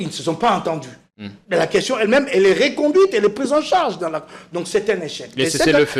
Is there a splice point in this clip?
no; 0 cuts

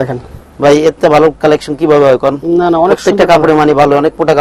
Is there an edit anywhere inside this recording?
no; 0 cuts

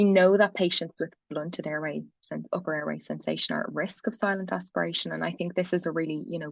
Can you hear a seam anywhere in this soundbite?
no; 0 cuts

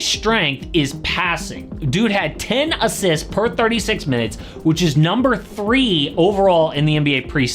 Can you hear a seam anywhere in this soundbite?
no; 0 cuts

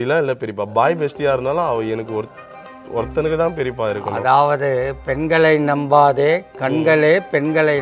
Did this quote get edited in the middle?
no; 0 cuts

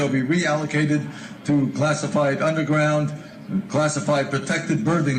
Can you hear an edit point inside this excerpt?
yes; 1 cut; at 3.3 s

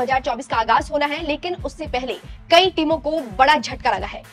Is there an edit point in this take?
no; 0 cuts

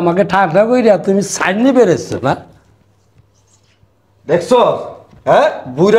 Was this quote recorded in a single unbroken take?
yes; 0 cuts

